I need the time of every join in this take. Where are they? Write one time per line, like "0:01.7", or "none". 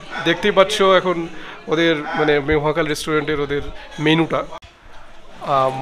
0:04.6